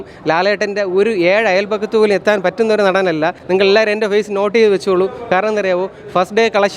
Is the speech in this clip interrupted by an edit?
yes; 1 cut; at 3.4 s

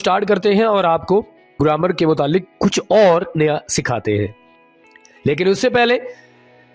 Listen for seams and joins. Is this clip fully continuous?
no; 1 cut; at 1.6 s

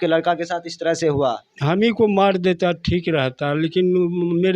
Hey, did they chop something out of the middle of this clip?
yes; 1 cut; at 1.5 s

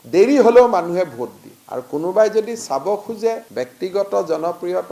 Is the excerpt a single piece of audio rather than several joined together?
yes; 0 cuts

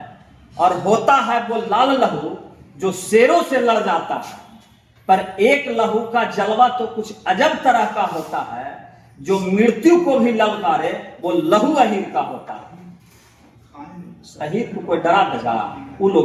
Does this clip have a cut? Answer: no; 0 cuts

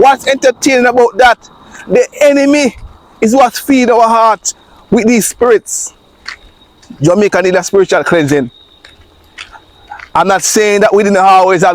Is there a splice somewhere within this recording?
no; 0 cuts

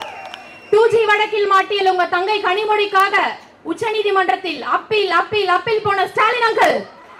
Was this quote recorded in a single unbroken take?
yes; 0 cuts

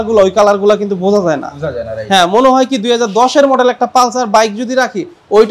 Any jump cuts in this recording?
no; 0 cuts

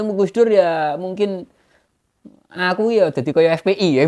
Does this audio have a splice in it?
no; 0 cuts

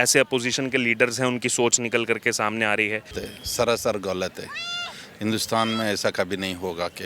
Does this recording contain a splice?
yes; 1 cut; at 3.2 s

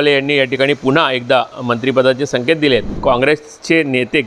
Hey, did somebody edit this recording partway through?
yes; 1 cut; at 2.9 s

